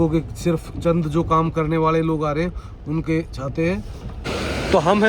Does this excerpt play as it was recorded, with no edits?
no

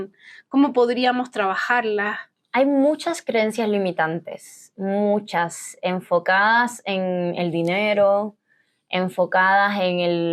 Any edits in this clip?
no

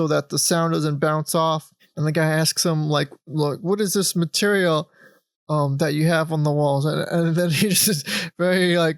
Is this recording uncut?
no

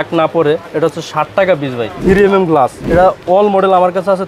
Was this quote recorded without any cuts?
no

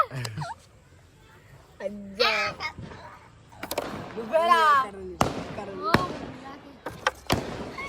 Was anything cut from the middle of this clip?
yes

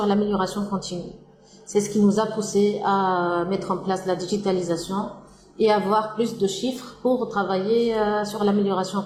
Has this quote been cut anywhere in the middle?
no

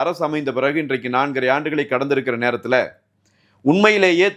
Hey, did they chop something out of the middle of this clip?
no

